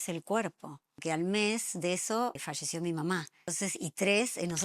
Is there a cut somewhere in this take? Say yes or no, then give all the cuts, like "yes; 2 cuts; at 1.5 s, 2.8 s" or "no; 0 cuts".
yes; 3 cuts; at 1.0 s, 2.4 s, 3.5 s